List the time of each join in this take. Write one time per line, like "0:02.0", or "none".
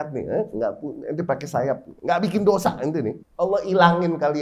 0:01.9
0:03.2